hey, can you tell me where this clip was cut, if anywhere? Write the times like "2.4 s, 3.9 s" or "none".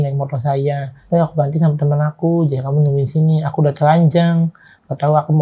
0.9 s